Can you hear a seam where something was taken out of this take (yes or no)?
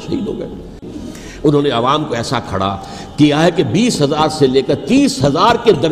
yes